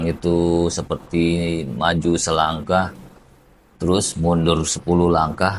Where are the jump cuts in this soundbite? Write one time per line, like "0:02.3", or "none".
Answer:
none